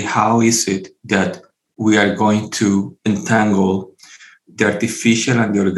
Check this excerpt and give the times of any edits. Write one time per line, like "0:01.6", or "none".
0:00.9
0:02.9